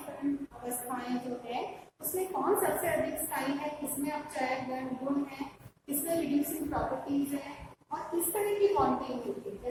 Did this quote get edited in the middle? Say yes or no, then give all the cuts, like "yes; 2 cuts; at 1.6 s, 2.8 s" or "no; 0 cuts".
no; 0 cuts